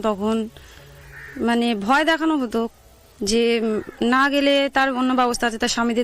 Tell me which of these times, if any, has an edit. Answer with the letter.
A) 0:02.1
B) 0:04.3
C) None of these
B